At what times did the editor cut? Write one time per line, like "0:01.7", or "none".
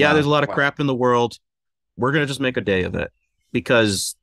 none